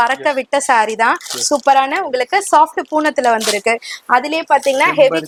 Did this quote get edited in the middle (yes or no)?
no